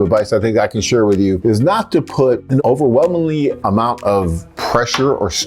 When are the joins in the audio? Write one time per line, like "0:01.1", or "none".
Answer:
0:01.4
0:02.6
0:03.6